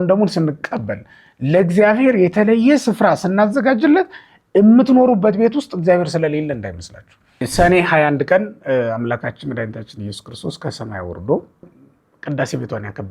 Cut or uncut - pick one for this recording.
cut